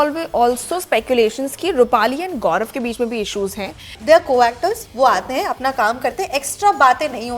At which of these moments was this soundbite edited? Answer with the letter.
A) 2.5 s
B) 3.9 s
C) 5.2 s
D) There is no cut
B